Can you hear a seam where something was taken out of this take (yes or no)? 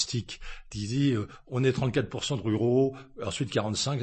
no